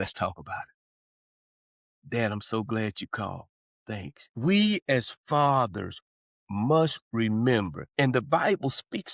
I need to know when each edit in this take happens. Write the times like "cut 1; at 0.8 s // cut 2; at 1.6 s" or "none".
cut 1; at 4.2 s

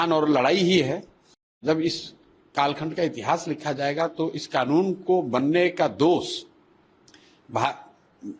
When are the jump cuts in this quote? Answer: cut 1; at 1.5 s

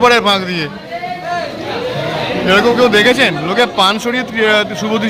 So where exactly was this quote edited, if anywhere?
none

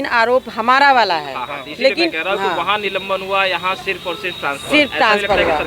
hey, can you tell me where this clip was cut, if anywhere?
none

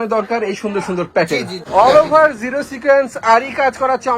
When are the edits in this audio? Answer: cut 1; at 1.6 s

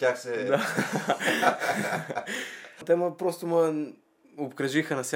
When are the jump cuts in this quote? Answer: cut 1; at 2.8 s

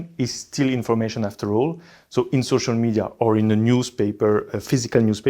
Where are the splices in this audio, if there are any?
none

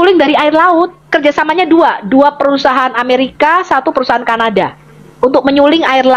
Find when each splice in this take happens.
cut 1; at 1.0 s

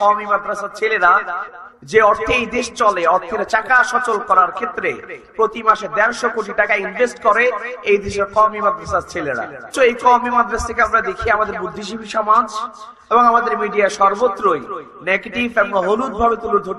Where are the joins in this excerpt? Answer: cut 1; at 1.4 s // cut 2; at 9.7 s

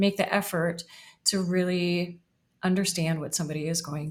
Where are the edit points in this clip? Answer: none

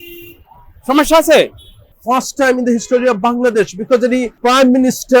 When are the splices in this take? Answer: cut 1; at 1.8 s // cut 2; at 4.3 s

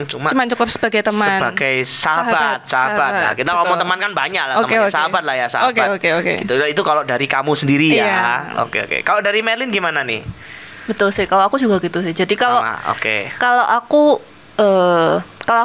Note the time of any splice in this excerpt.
none

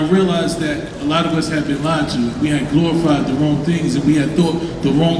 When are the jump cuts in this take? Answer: none

